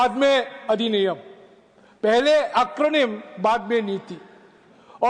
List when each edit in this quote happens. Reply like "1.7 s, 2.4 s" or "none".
none